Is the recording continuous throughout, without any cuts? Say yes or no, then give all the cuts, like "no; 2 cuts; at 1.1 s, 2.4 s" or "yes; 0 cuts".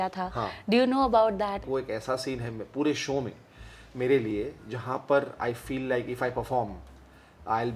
no; 1 cut; at 1.6 s